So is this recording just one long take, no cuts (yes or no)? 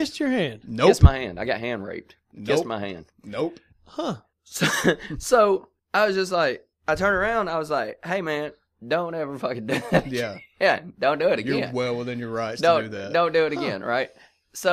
yes